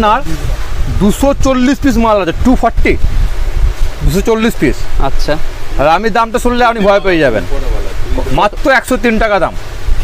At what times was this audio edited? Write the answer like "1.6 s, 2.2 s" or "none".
none